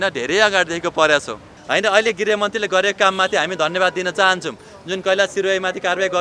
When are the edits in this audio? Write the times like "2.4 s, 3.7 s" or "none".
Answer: 1.6 s